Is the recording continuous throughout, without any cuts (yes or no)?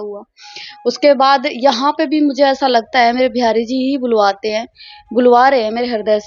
yes